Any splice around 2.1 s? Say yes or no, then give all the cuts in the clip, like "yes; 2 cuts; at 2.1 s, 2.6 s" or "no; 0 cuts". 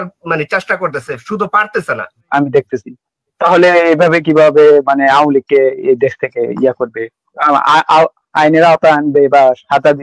yes; 1 cut; at 2.1 s